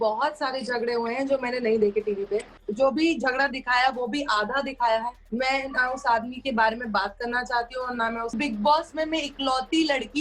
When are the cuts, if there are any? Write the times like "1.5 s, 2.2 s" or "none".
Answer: 2.6 s, 5.2 s, 8.3 s